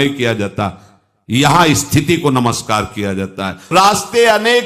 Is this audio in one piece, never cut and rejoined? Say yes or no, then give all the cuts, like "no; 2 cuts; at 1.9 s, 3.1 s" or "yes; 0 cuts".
no; 1 cut; at 3.7 s